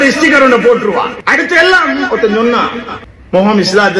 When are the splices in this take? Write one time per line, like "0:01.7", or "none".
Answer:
0:01.2